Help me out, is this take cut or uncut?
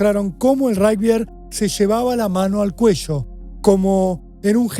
uncut